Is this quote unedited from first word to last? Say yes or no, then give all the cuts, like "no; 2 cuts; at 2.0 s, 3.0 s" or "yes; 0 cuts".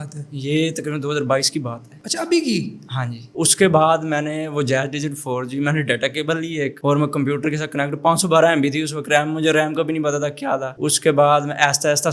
yes; 0 cuts